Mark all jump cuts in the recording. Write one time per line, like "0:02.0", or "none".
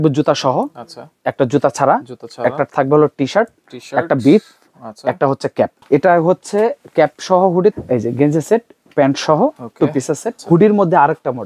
0:05.8
0:07.7
0:10.3